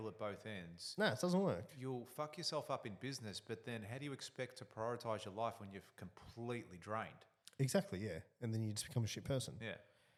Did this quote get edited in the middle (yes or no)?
no